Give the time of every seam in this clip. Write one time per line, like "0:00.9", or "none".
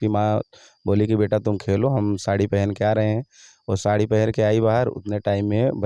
none